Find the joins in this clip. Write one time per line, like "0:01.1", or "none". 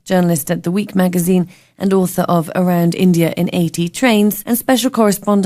0:00.9